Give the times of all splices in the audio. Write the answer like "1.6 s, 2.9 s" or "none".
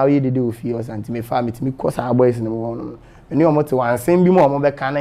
none